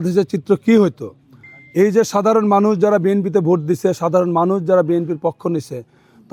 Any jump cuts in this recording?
no; 0 cuts

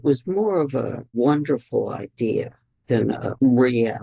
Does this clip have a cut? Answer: yes; 2 cuts; at 1.1 s, 2.8 s

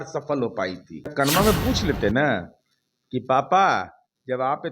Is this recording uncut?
no; 1 cut; at 1.1 s

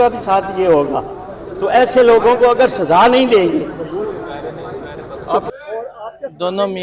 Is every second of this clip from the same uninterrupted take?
yes; 0 cuts

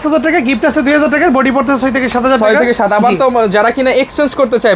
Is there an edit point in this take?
no; 0 cuts

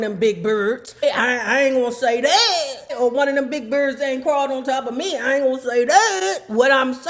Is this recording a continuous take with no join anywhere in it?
no; 2 cuts; at 1.0 s, 2.9 s

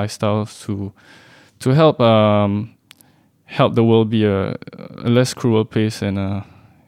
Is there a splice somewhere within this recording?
no; 0 cuts

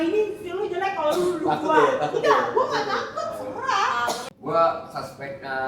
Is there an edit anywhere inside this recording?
yes; 1 cut; at 4.3 s

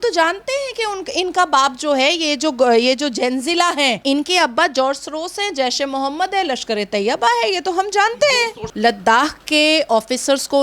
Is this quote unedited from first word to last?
no; 1 cut; at 8.7 s

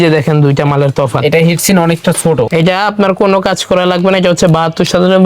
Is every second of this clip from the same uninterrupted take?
no; 1 cut; at 2.5 s

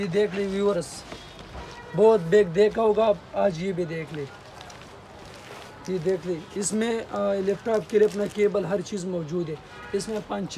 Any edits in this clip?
no; 0 cuts

